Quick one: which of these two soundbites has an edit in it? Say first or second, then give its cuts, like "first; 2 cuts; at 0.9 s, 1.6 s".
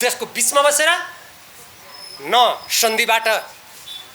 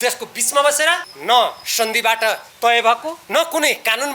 second; 3 cuts; at 1.1 s, 2.5 s, 3.1 s